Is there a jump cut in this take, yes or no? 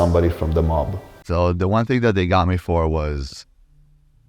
yes